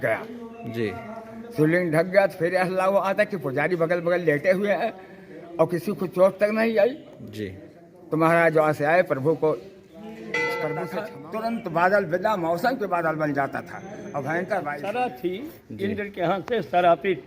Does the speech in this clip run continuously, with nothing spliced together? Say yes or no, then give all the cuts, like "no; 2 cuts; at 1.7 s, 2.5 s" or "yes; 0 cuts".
no; 2 cuts; at 11.1 s, 14.8 s